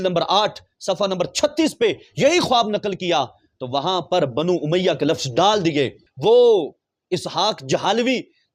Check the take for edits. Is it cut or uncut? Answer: cut